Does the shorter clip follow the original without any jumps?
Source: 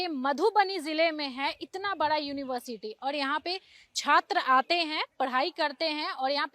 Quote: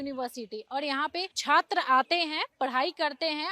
no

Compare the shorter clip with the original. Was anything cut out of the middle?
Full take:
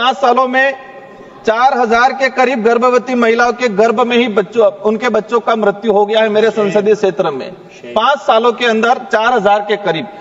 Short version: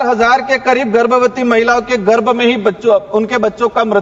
no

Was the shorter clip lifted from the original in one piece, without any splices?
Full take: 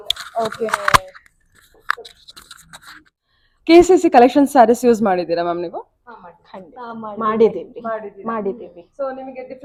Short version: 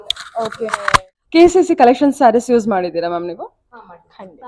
no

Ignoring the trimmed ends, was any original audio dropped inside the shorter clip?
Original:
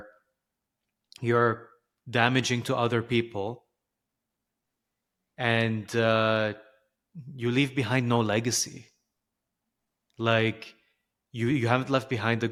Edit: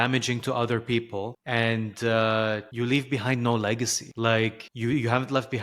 yes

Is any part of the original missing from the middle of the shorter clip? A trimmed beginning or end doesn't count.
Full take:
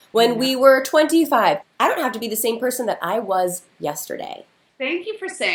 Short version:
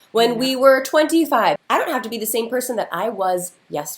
yes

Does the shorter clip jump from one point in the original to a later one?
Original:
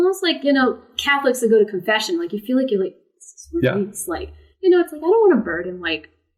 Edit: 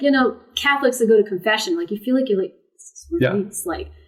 no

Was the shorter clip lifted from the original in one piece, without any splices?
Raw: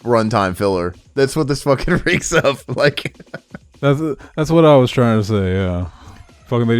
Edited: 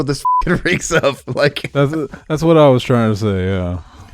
no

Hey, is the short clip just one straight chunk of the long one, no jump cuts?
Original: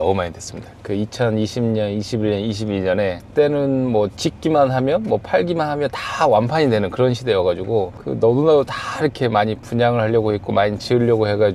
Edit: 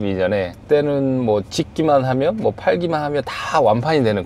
yes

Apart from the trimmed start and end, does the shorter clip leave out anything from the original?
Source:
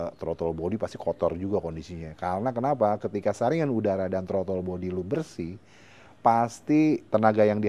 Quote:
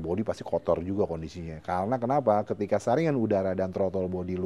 no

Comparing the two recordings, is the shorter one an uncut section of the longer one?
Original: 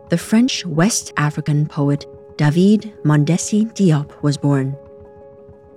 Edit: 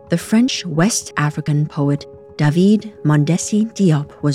yes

